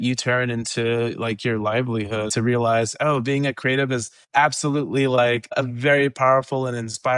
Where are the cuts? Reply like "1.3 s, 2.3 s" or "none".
2.3 s, 4.2 s, 5.6 s